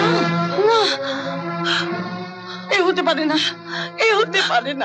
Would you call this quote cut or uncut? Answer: uncut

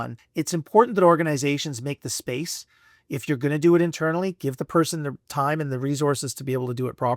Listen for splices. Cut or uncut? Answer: uncut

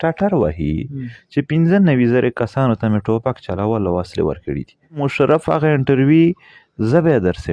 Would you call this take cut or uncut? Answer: cut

